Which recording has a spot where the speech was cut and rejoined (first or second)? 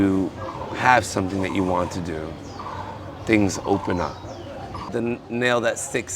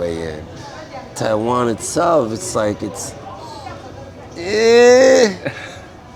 first